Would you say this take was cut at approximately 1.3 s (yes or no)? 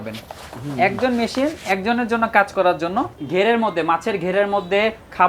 no